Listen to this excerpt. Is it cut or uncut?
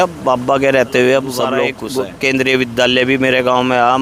cut